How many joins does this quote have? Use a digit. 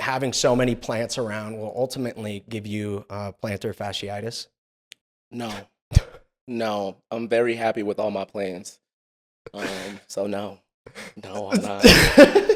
0